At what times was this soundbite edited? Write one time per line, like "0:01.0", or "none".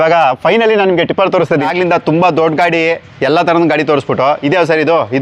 0:01.6

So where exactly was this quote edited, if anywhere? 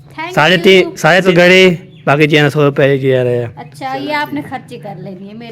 0:01.3

